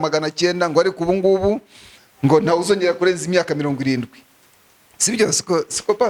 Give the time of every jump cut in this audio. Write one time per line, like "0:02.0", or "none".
none

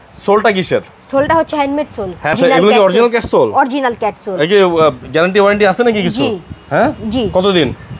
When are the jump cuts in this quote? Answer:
0:02.3

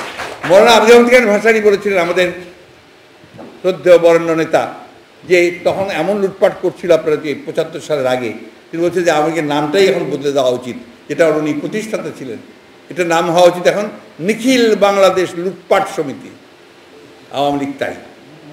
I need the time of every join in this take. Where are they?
none

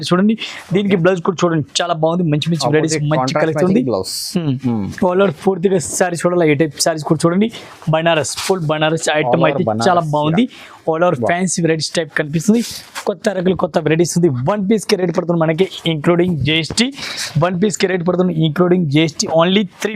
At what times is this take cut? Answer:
none

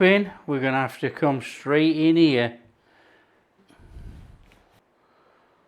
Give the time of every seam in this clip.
0:03.6
0:04.8

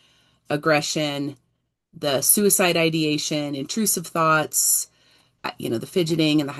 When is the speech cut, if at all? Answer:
0:05.5

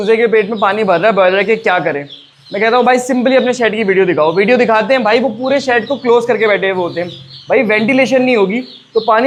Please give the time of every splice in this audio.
none

